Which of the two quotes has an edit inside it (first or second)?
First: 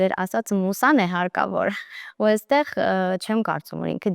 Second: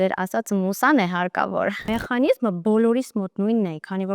second